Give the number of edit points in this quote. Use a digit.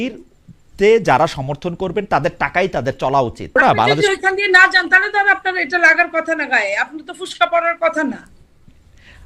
1